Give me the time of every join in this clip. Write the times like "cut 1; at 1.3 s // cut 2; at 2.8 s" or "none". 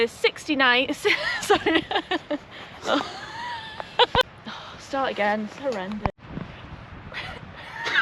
cut 1; at 4.4 s // cut 2; at 6.2 s